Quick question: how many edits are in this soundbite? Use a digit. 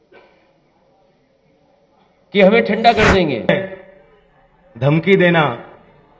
1